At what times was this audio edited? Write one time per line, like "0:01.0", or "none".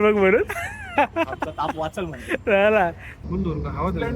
0:03.1